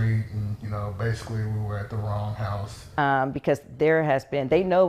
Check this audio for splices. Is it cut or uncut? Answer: cut